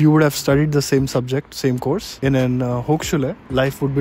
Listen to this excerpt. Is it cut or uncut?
uncut